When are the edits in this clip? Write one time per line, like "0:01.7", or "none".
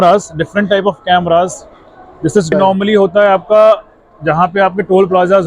0:02.5